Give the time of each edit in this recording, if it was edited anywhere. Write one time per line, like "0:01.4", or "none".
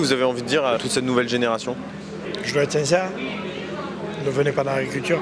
0:00.8
0:02.1